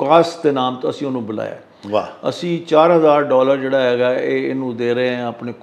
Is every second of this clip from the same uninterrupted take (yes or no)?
yes